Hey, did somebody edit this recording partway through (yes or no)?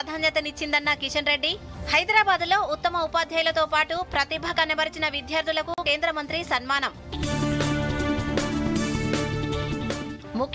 no